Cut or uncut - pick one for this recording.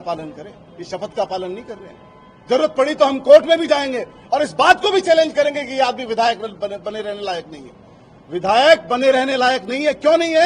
uncut